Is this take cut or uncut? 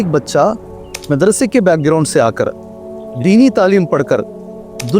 cut